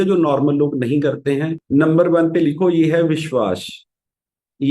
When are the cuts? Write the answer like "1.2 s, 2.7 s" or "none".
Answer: 1.6 s